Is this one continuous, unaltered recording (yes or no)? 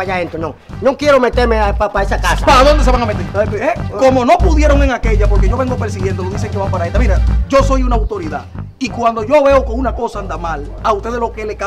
yes